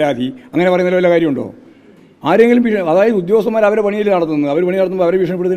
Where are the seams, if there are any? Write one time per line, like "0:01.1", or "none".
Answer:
none